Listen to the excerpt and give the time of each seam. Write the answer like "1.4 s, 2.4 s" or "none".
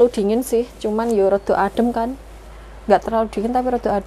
none